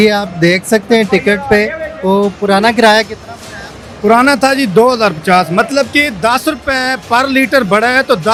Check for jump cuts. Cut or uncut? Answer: uncut